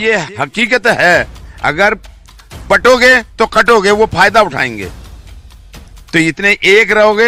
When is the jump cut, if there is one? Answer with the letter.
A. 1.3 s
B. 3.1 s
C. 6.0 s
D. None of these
D